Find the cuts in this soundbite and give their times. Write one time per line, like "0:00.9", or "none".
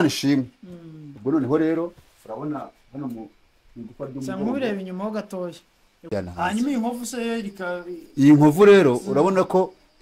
0:06.1